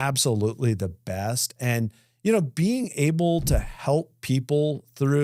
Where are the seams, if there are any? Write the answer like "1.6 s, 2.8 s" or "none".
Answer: none